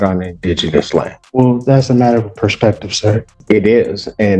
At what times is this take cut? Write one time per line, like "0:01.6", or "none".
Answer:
0:01.2
0:03.3

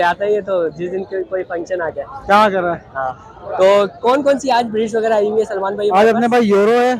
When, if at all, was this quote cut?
none

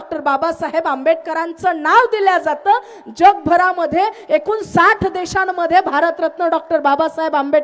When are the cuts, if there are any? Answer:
none

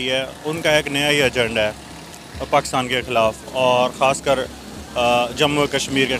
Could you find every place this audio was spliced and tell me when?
none

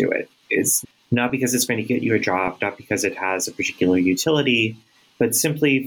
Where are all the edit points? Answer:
none

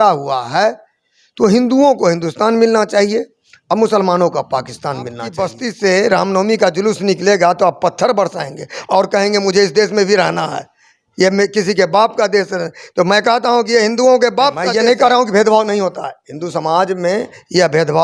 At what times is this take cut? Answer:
0:05.2
0:14.7

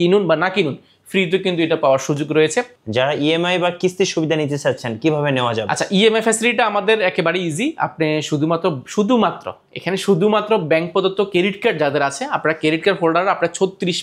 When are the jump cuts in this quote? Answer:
0:02.8

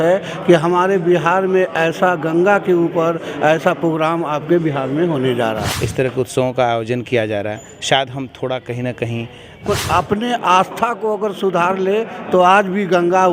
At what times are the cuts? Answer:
0:05.7
0:09.7

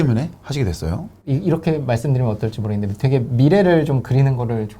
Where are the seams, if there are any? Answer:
0:01.1

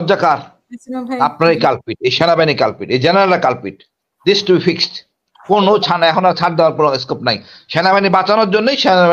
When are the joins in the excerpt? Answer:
none

